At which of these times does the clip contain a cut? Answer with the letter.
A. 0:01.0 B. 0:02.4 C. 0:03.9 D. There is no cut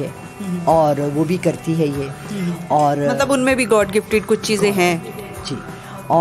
D